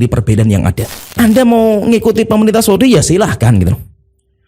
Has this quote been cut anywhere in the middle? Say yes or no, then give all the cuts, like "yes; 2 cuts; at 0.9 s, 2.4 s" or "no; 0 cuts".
yes; 1 cut; at 1.1 s